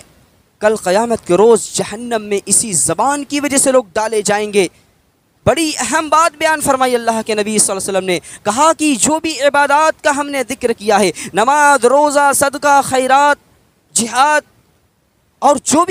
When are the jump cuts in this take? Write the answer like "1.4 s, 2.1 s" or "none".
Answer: none